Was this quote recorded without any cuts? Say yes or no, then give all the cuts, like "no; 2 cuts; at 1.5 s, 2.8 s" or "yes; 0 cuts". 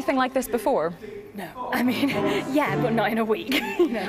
no; 1 cut; at 1.6 s